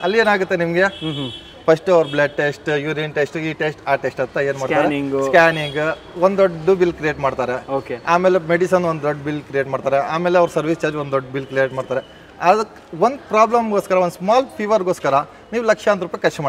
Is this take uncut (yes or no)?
yes